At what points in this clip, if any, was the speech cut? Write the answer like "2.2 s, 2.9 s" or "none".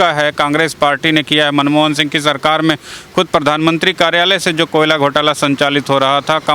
none